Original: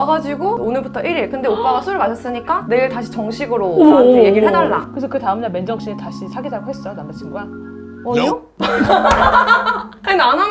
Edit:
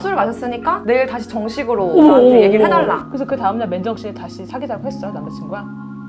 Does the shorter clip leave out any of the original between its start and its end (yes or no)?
no